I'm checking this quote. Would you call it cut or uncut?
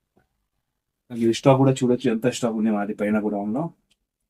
cut